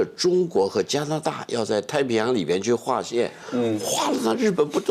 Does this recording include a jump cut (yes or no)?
no